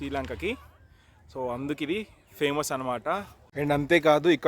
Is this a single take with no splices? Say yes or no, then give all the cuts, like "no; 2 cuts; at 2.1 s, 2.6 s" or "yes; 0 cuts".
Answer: no; 1 cut; at 3.4 s